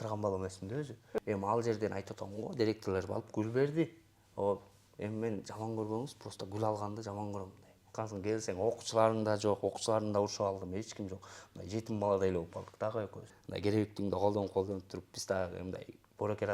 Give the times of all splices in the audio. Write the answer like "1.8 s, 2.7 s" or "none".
1.2 s, 7.9 s, 13.3 s